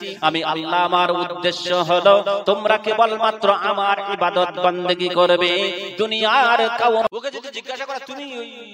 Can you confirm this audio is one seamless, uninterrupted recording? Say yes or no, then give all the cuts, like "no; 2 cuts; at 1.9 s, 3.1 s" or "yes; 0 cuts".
no; 1 cut; at 7.1 s